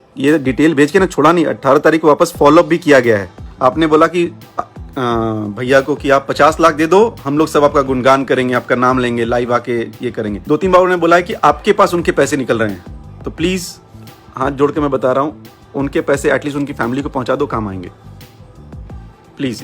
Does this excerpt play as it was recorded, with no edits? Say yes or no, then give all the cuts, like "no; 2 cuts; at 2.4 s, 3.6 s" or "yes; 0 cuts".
no; 2 cuts; at 3.4 s, 10.4 s